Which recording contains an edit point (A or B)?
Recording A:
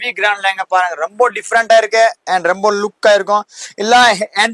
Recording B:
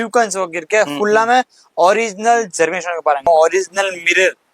B